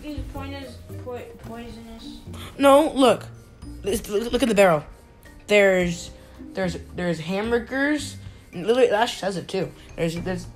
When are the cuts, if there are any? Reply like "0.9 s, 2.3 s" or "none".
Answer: none